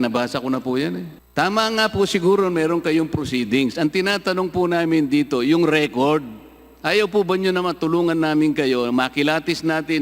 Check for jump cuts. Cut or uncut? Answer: cut